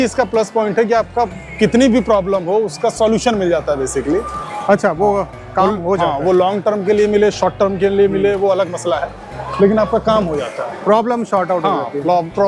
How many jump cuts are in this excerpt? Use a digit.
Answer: 0